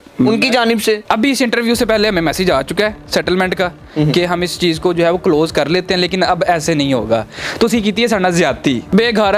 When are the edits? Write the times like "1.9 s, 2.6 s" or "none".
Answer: none